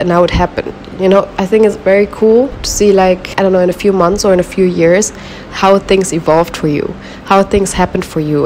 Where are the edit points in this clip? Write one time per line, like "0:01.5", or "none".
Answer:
none

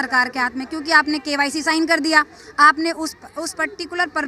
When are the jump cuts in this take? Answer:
none

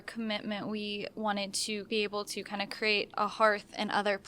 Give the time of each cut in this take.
0:01.9
0:03.1

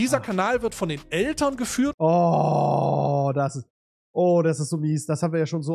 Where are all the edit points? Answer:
0:01.9

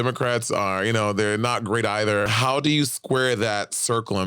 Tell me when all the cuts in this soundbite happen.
0:02.3

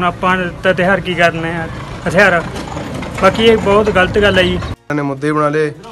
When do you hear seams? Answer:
0:04.8

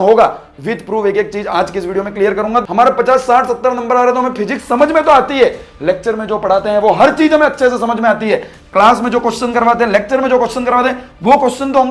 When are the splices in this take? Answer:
0:02.7

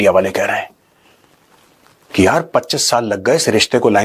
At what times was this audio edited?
none

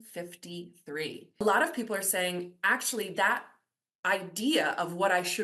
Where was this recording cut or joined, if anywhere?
0:01.4

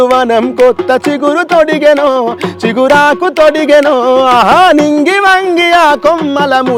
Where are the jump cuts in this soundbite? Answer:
none

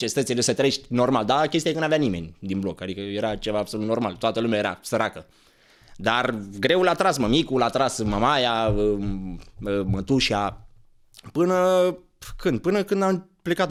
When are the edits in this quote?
none

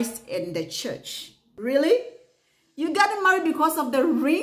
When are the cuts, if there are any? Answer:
0:01.4

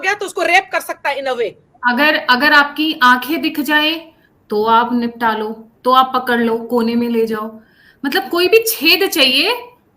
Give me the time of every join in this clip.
0:01.7

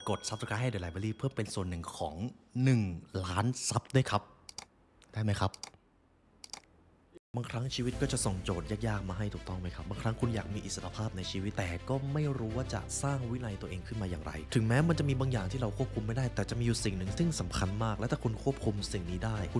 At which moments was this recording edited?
0:07.3

